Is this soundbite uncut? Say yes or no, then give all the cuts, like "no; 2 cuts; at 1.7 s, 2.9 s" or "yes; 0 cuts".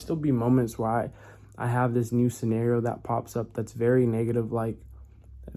yes; 0 cuts